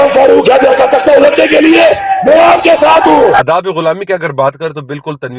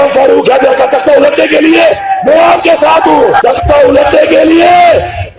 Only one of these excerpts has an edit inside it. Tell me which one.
first; 1 cut; at 3.4 s

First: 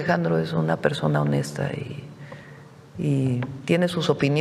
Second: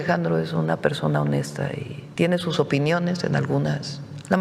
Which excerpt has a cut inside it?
second; 1 cut; at 2.0 s

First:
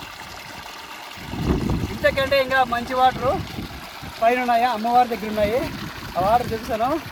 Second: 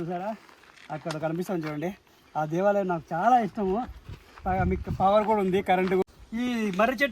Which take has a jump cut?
second; 1 cut; at 6.0 s

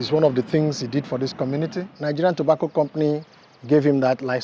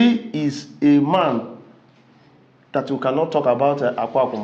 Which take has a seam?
first; 1 cut; at 1.9 s

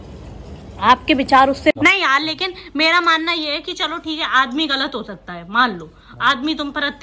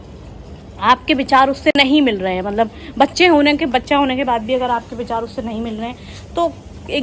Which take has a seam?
first; 1 cut; at 1.7 s

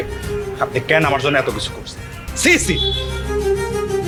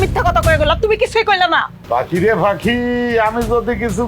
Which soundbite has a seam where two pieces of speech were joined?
second; 1 cut; at 1.7 s

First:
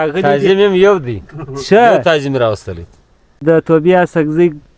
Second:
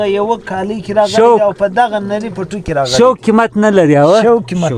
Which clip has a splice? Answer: first; 1 cut; at 3.4 s

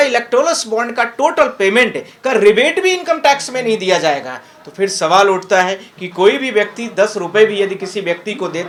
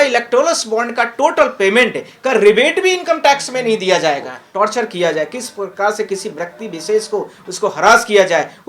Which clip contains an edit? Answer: second; 1 cut; at 4.4 s

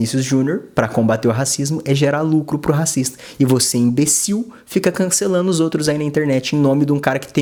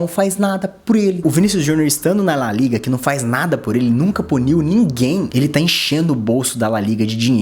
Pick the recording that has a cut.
second; 1 cut; at 1.2 s

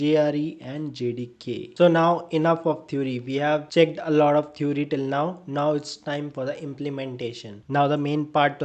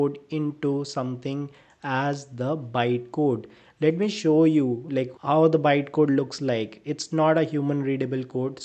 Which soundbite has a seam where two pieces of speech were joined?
first; 2 cuts; at 1.7 s, 7.6 s

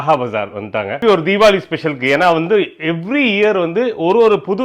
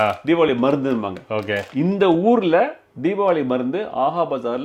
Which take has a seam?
first; 1 cut; at 1.0 s

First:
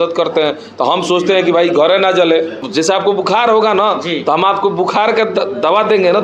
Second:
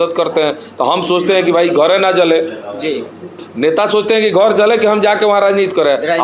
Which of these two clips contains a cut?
first; 1 cut; at 2.7 s

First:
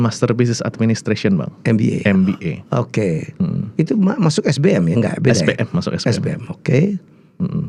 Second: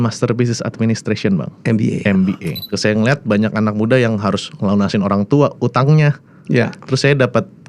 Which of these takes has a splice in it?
second; 1 cut; at 2.5 s

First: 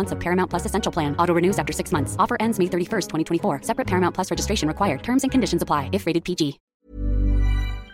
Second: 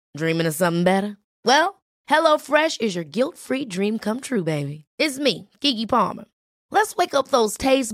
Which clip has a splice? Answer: first; 1 cut; at 6.6 s

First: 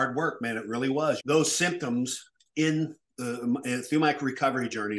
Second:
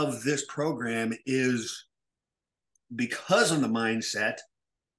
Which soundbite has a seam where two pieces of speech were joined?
first; 1 cut; at 1.2 s

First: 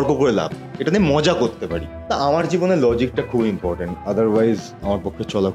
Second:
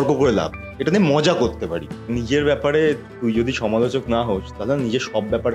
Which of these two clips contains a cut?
second; 1 cut; at 2.1 s

